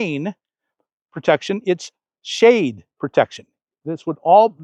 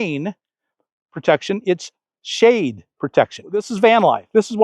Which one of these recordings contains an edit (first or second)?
second